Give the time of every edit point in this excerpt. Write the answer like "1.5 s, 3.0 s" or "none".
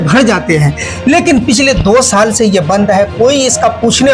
none

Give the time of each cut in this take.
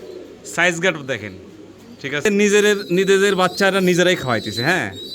2.3 s

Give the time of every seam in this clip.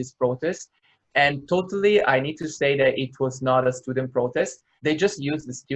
4.7 s

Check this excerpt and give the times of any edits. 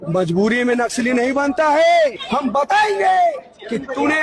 2.2 s

